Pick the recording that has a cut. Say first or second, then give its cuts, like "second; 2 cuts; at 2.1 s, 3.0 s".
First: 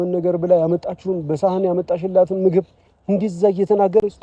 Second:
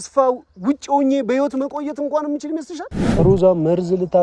second; 1 cut; at 3.0 s